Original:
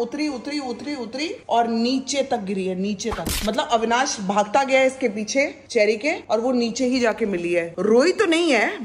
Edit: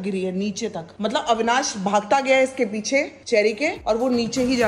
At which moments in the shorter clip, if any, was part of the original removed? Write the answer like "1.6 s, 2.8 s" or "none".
none

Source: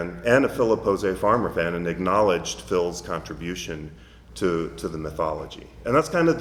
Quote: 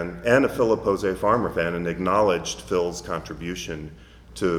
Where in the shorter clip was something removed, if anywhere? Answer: none

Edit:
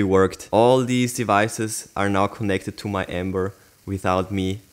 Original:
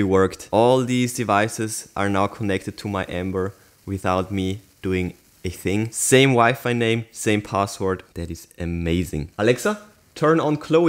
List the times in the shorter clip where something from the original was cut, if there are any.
none

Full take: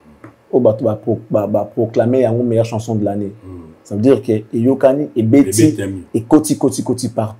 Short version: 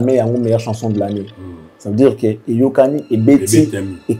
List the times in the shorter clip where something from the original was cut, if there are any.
none

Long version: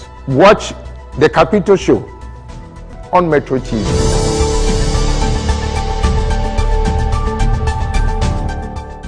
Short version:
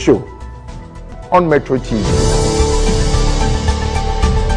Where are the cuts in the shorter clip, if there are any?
none

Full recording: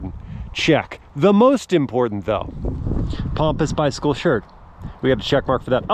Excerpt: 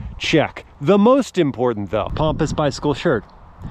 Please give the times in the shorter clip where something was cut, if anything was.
2.1 s

